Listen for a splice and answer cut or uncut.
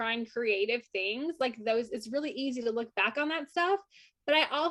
uncut